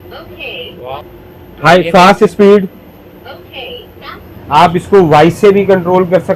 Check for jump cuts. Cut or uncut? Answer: cut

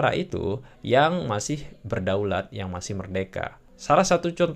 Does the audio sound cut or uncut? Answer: cut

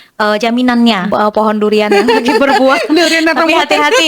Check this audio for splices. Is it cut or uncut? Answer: cut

